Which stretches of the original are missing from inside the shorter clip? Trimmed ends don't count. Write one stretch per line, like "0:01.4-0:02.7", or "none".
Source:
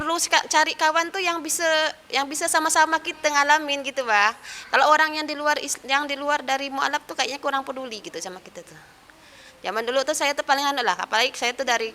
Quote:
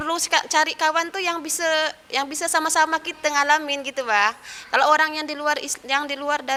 none